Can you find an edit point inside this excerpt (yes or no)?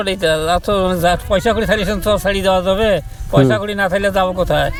no